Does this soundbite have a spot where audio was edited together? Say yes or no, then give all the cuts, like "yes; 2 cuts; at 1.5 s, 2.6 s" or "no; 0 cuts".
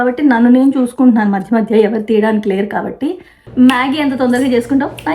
yes; 1 cut; at 3.4 s